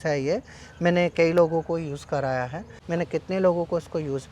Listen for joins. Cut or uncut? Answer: cut